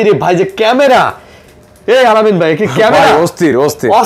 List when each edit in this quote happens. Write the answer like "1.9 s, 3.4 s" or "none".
none